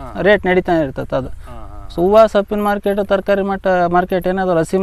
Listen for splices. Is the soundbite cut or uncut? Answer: uncut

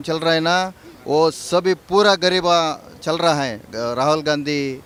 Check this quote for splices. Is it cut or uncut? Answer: uncut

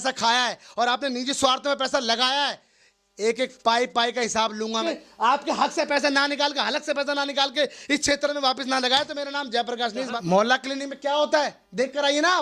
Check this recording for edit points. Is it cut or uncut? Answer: cut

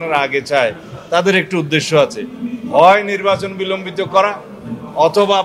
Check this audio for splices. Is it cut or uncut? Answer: uncut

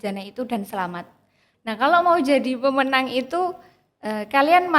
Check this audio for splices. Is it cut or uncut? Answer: cut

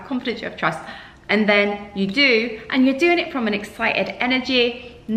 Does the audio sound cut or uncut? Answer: uncut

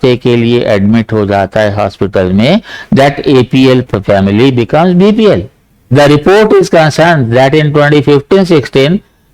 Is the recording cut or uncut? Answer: cut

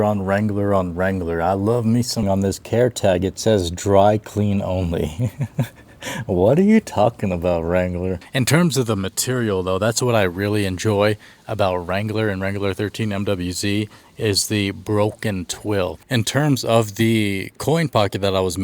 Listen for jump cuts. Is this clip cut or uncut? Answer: cut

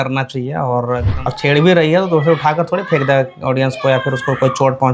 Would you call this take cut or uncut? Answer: cut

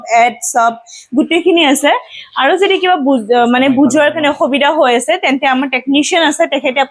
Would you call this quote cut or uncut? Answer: uncut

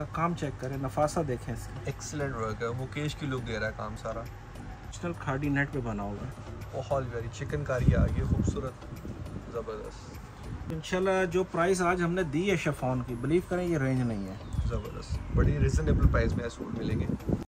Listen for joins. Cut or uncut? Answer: cut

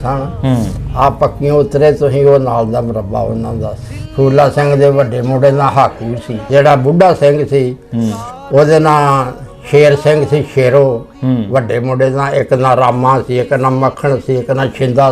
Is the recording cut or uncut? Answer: cut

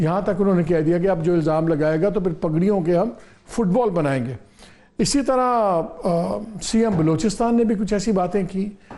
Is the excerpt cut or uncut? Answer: uncut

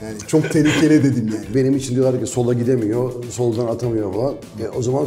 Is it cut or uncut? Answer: cut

